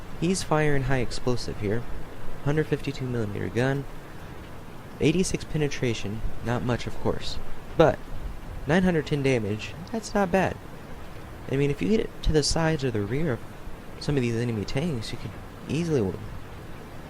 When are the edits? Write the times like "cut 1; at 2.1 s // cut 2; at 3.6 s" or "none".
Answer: cut 1; at 11.6 s

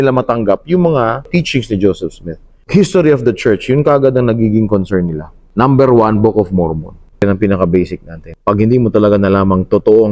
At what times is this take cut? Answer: cut 1; at 1.3 s // cut 2; at 7.2 s

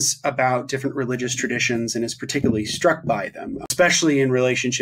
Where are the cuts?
cut 1; at 3.7 s

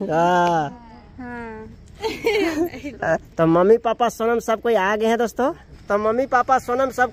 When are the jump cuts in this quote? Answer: cut 1; at 1.1 s // cut 2; at 3.3 s // cut 3; at 5.7 s

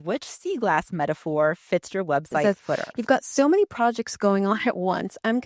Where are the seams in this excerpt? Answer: cut 1; at 2.4 s

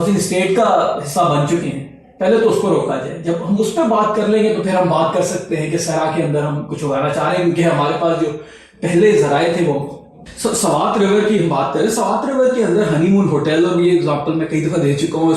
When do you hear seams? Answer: cut 1; at 10.3 s

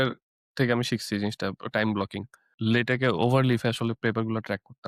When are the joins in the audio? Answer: cut 1; at 2.5 s

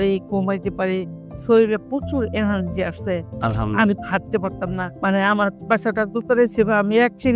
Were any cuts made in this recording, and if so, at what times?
cut 1; at 4.9 s

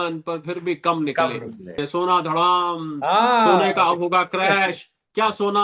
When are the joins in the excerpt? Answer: cut 1; at 1.7 s

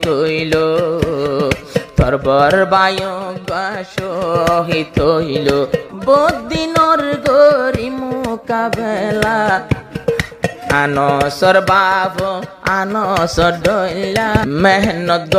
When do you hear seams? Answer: cut 1; at 5.9 s // cut 2; at 14.4 s

